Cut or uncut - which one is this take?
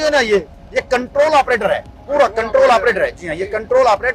uncut